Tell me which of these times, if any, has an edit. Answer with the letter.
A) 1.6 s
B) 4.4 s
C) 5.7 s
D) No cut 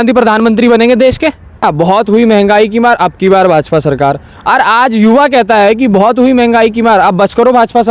A